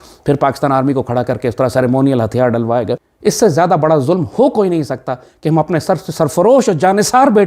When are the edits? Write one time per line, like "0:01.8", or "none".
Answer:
0:03.1